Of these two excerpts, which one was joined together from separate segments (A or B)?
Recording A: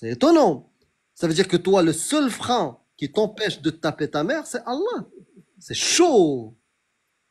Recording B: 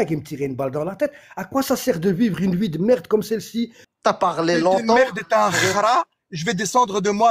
B